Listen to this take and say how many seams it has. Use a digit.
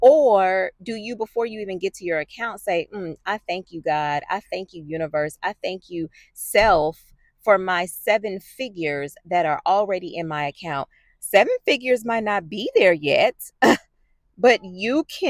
0